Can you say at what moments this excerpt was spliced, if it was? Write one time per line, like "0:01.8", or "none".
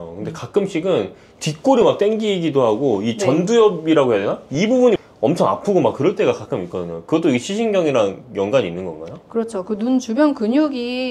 none